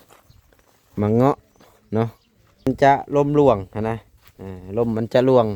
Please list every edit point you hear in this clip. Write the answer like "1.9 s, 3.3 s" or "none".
2.7 s